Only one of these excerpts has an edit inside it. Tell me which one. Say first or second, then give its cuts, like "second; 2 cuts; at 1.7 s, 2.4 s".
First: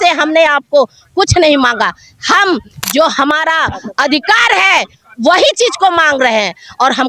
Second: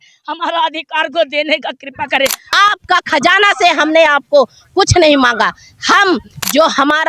second; 1 cut; at 2.4 s